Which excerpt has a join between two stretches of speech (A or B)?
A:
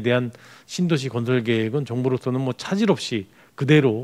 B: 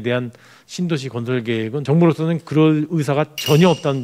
B